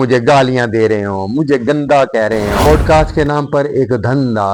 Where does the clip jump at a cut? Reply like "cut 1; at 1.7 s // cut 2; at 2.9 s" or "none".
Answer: cut 1; at 2.6 s